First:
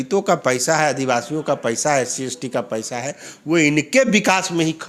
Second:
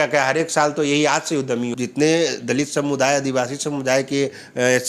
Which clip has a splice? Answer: second; 1 cut; at 1.7 s

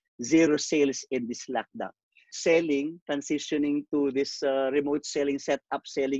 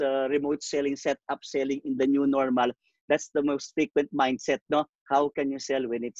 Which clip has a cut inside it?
first; 1 cut; at 2.4 s

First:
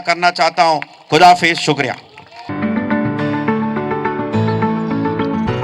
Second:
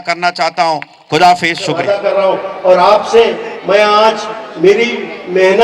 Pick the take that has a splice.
second; 1 cut; at 1.8 s

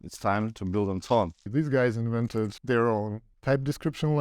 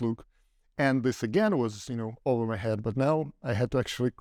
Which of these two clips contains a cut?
first; 3 cuts; at 1.5 s, 2.6 s, 3.2 s

